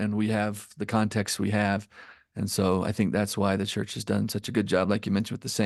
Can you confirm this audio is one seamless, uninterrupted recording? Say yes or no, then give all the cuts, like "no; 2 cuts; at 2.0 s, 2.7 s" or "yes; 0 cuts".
yes; 0 cuts